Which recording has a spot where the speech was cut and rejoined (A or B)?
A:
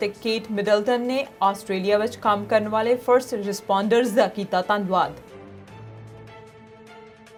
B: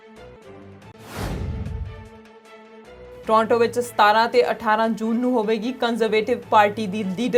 B